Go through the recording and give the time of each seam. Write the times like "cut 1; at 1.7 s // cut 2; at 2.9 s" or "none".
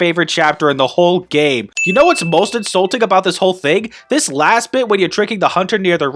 cut 1; at 1.7 s